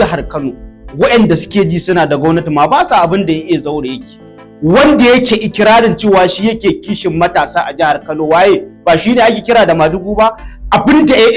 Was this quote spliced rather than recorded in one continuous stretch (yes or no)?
no